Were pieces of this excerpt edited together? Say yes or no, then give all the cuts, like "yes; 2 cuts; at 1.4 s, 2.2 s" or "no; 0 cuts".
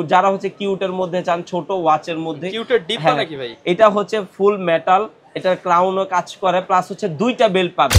no; 0 cuts